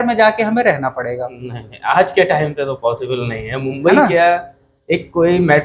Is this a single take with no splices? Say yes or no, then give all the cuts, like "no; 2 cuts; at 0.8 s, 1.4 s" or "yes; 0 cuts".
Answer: yes; 0 cuts